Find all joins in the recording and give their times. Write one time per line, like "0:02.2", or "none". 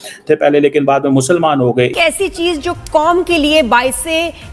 0:01.9